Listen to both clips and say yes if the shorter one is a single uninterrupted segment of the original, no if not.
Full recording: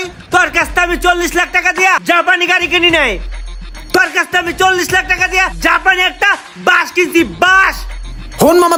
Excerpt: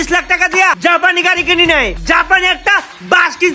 no